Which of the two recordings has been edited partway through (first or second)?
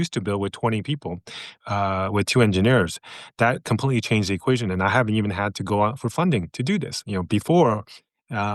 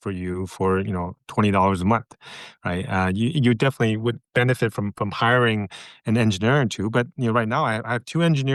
first